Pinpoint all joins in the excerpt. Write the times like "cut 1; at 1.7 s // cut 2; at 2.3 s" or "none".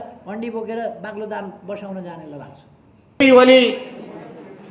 cut 1; at 3.2 s